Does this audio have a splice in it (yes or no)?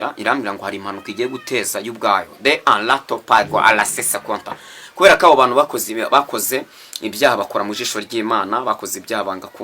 no